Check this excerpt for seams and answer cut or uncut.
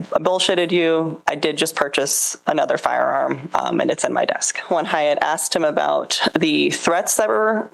cut